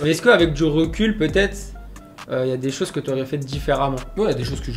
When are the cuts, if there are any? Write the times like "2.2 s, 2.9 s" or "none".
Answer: none